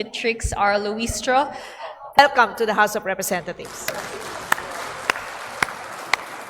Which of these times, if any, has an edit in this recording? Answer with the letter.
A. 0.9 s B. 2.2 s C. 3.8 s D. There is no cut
B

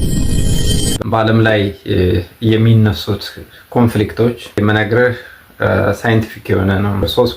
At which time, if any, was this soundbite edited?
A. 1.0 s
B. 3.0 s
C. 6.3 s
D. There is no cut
A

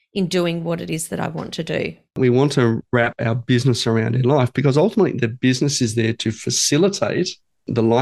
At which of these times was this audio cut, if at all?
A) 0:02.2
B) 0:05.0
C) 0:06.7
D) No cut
A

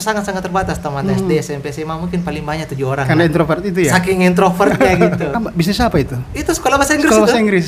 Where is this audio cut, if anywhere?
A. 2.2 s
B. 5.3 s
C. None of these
B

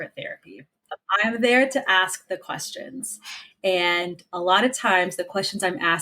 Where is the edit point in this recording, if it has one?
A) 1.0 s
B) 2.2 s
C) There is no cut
A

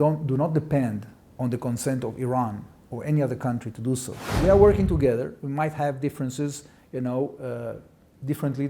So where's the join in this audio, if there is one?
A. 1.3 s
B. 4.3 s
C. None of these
B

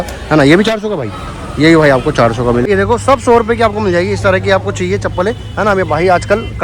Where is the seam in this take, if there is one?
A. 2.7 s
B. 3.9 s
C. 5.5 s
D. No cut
A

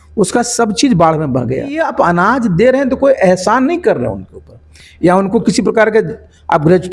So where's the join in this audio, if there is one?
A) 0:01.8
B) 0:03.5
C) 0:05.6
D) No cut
A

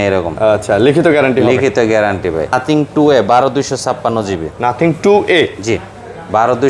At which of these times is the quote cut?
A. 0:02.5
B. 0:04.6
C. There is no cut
A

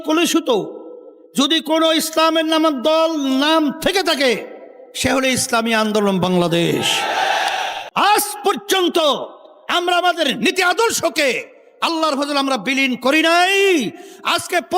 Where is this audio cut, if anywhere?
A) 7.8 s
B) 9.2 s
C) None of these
A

